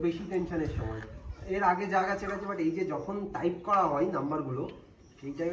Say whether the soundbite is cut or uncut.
uncut